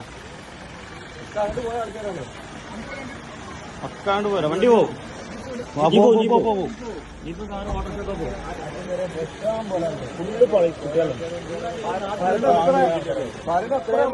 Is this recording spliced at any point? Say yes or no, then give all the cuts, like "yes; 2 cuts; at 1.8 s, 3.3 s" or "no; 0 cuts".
no; 0 cuts